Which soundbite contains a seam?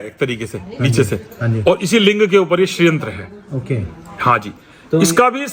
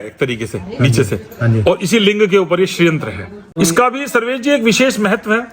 second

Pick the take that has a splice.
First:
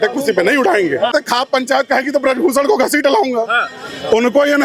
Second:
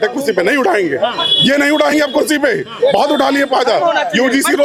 first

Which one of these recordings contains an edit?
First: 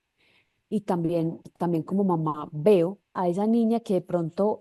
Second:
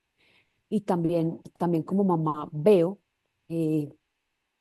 first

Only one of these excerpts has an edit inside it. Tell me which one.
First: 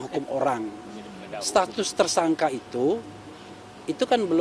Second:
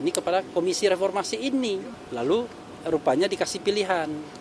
second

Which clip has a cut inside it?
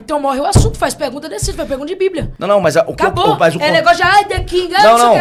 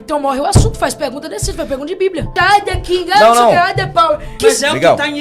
second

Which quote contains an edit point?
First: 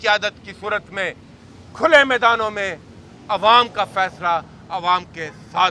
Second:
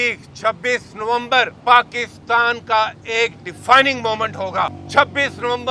second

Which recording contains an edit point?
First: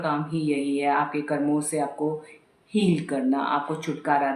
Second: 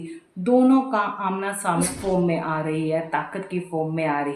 second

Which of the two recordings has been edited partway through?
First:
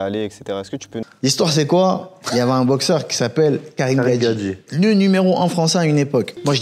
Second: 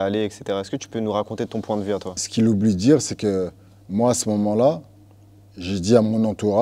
second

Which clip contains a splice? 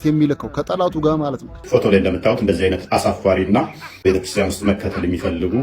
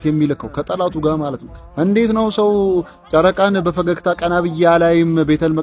first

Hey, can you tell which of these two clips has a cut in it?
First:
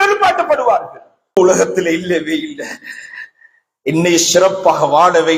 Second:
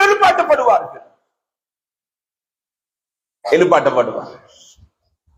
first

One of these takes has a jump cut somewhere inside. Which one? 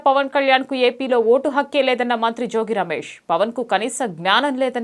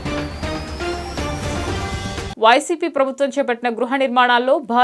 second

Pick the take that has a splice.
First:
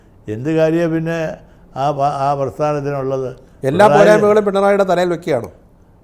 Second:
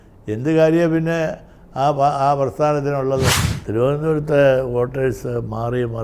second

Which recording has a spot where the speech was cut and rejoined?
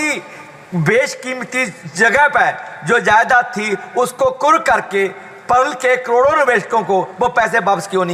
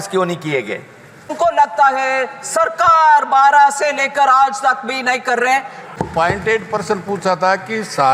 second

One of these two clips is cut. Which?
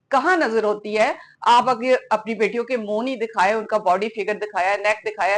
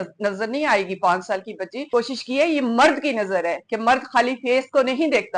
second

